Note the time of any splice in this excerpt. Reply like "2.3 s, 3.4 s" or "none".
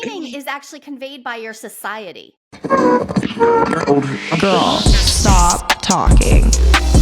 2.4 s